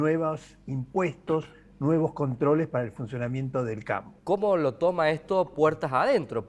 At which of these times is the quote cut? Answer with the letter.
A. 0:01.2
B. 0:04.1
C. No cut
B